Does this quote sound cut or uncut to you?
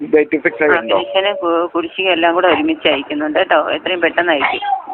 uncut